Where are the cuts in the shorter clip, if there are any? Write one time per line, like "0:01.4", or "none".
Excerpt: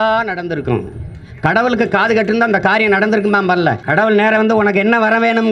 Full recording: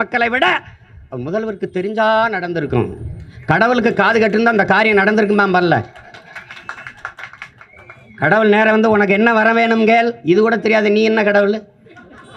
0:03.8

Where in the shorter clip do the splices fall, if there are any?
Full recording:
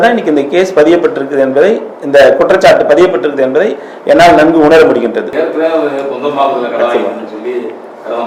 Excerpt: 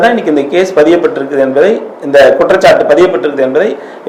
none

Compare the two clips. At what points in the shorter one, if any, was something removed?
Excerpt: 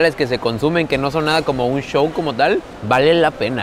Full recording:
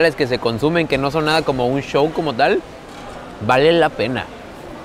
0:02.7

